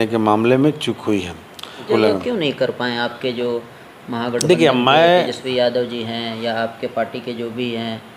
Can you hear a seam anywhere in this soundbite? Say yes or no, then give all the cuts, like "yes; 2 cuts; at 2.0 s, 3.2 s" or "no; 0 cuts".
yes; 1 cut; at 1.9 s